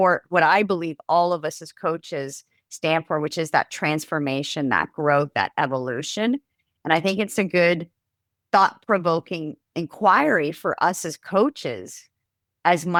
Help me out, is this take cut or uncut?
uncut